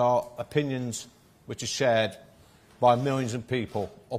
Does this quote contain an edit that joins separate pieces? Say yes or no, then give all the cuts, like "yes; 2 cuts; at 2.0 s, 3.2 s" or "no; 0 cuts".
no; 0 cuts